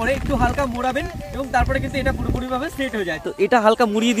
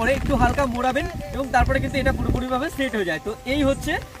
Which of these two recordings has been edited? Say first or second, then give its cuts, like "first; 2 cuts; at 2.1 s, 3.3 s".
first; 1 cut; at 3.2 s